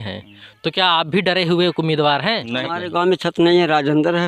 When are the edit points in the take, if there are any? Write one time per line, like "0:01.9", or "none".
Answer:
0:02.6